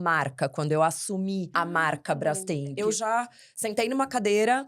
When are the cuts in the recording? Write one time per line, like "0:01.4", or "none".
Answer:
0:01.5
0:02.8

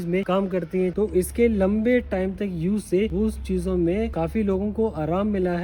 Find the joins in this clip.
0:00.9
0:04.1

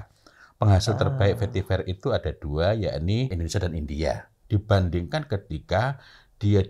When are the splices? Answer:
0:03.3
0:04.4

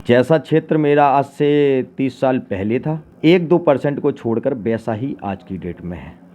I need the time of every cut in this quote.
0:03.1

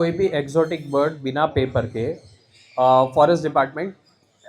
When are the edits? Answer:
none

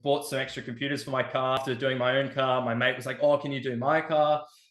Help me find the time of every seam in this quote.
0:01.6

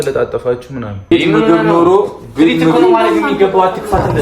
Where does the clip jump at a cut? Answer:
0:01.1

